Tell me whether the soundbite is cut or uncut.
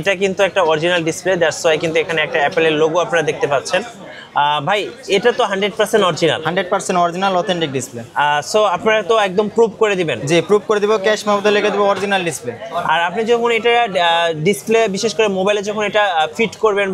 uncut